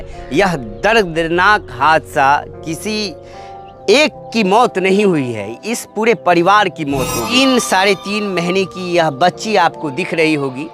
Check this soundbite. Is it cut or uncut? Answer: cut